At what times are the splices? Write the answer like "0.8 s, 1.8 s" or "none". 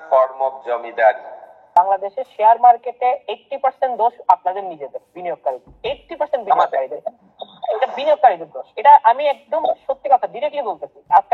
1.7 s